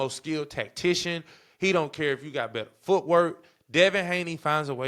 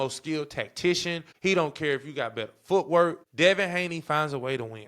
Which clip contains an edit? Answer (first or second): second